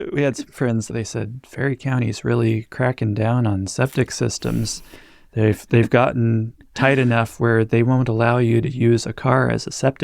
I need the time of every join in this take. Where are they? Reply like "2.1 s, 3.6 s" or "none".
0.9 s